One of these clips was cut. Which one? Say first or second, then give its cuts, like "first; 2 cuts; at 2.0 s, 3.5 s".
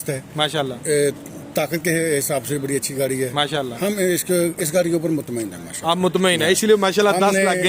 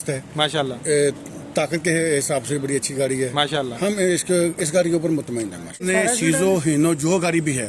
second; 1 cut; at 5.8 s